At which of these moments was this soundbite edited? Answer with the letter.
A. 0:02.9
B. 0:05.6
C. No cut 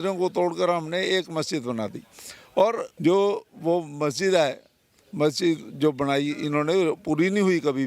A